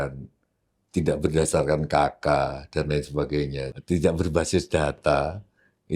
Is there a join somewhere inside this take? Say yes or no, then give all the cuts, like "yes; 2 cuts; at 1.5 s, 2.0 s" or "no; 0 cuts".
yes; 1 cut; at 3.7 s